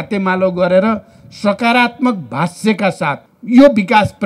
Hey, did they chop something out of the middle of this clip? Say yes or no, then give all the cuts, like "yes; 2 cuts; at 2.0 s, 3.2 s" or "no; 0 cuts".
yes; 1 cut; at 3.3 s